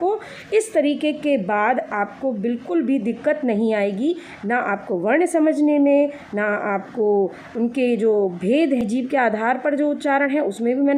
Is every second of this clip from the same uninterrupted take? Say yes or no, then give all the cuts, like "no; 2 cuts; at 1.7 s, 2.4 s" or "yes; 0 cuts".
no; 1 cut; at 8.8 s